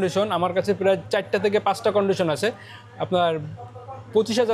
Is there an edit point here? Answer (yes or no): no